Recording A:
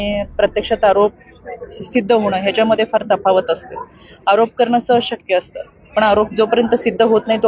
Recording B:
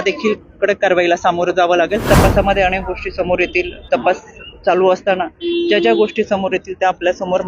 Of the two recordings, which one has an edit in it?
B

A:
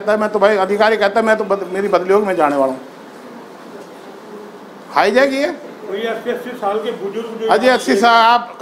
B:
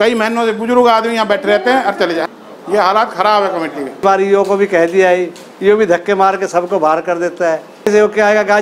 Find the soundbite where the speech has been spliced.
B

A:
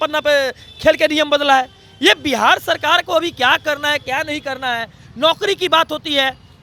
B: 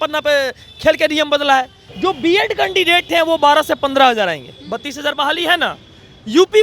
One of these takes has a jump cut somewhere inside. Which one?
B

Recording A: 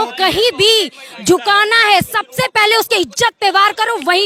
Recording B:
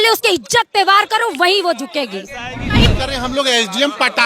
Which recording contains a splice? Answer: B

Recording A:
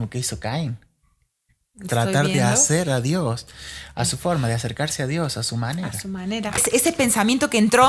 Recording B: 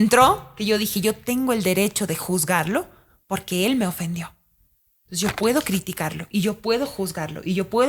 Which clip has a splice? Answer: A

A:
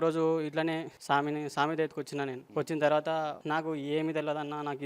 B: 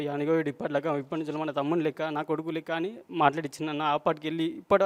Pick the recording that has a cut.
A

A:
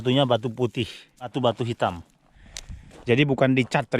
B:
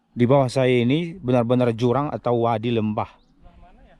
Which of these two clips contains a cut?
A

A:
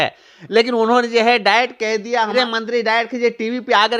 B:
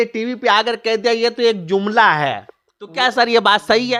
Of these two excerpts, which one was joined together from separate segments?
A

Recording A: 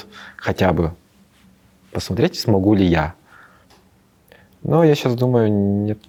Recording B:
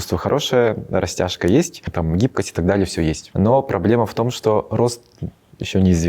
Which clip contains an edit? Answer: B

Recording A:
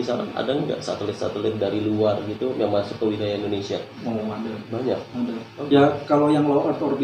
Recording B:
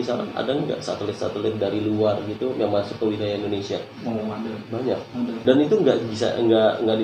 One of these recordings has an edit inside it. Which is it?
B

